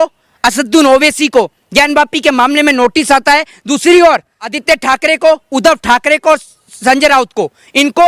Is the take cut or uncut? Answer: cut